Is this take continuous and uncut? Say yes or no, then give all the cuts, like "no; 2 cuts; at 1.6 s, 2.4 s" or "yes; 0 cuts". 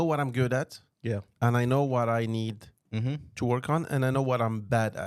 no; 1 cut; at 2.8 s